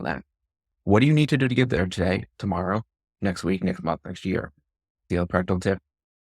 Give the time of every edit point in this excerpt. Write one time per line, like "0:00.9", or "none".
0:05.1